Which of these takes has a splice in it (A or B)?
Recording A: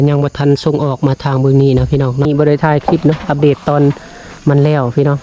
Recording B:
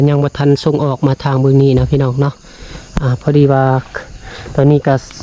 A